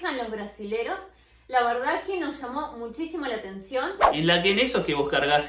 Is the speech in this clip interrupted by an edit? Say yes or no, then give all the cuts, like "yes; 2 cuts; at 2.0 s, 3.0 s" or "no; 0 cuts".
yes; 1 cut; at 4.0 s